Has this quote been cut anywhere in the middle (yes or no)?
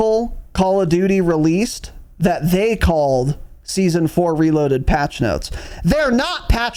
no